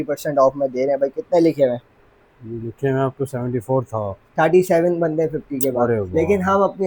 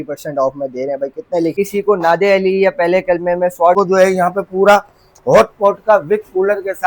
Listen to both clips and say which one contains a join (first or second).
second